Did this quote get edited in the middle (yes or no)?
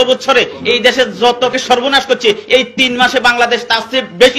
yes